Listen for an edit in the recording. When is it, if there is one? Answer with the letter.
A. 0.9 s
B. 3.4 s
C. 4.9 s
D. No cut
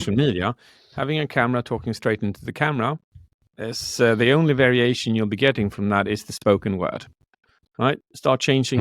A